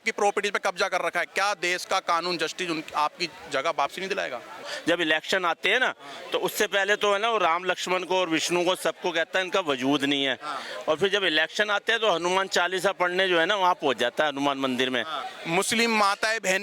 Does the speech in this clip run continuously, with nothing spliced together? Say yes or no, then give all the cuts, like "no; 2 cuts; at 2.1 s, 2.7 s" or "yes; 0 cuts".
no; 2 cuts; at 4.7 s, 15.3 s